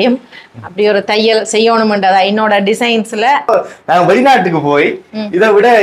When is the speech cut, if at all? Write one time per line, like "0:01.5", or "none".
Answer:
0:03.5